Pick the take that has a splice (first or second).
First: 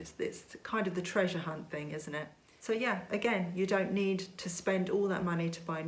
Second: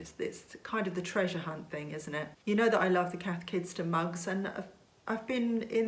first